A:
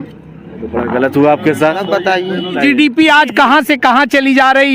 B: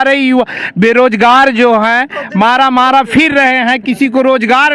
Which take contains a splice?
A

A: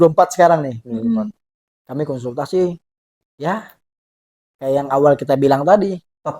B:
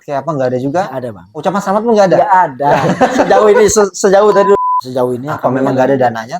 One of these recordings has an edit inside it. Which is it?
B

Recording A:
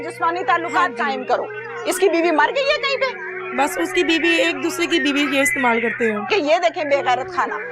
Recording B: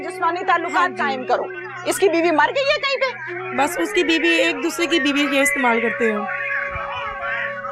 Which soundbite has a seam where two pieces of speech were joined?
A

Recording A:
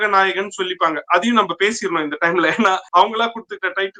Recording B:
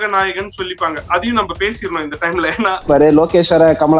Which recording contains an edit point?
B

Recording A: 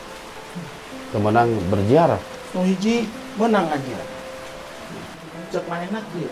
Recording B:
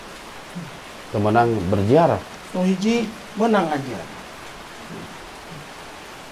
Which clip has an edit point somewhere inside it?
A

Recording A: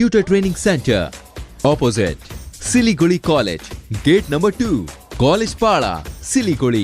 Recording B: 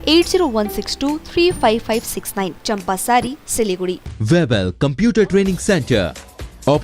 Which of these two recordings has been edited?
B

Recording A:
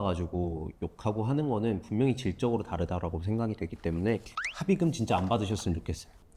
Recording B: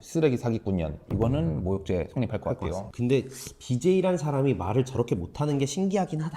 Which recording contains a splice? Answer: B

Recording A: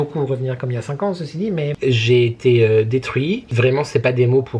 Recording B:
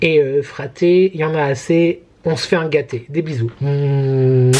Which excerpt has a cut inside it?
A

